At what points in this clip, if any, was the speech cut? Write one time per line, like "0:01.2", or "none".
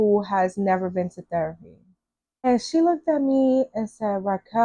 0:02.4